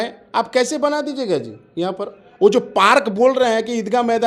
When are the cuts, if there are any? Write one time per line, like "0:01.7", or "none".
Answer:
none

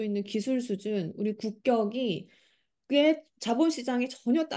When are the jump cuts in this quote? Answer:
none

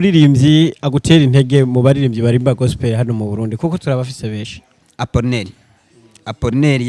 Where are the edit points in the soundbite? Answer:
0:04.8

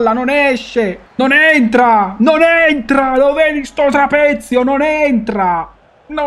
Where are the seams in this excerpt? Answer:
0:01.0

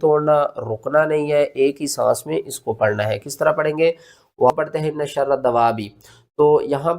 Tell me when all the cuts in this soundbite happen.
0:04.5

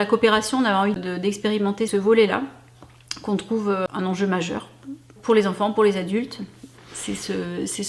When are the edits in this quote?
0:01.5
0:03.9
0:05.2

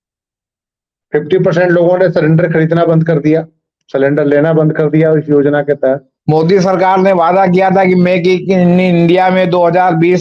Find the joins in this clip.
0:06.1

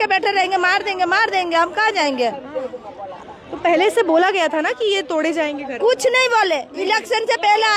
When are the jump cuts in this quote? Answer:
none

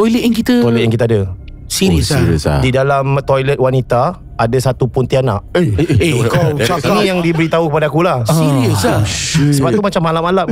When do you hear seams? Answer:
0:06.9

